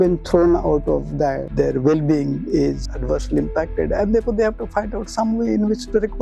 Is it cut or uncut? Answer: cut